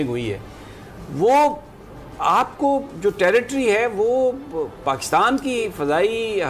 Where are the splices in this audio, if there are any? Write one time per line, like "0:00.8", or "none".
none